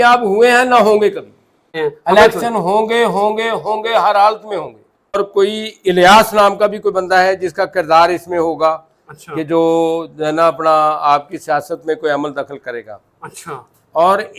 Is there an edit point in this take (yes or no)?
yes